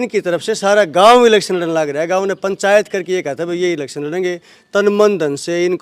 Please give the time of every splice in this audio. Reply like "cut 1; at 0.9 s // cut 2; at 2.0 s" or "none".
none